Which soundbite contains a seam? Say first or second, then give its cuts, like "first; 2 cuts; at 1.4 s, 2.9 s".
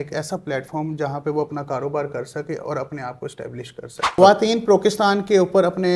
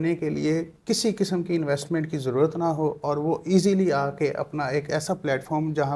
first; 1 cut; at 4.2 s